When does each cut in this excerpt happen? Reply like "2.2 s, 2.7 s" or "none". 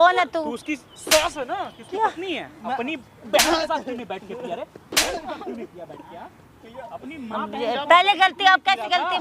2.6 s

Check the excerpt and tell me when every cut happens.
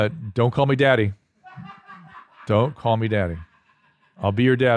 none

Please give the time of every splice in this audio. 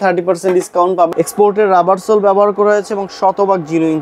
1.1 s

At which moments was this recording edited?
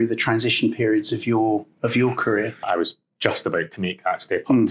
2.6 s

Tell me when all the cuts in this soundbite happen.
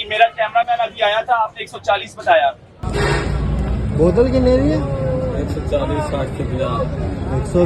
2.7 s

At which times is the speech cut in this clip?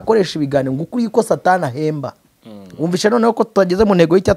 none

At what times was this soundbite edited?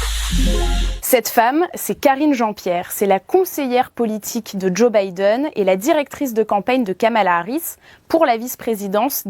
0.9 s

